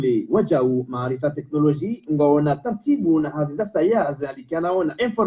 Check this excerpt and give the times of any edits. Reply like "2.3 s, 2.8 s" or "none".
none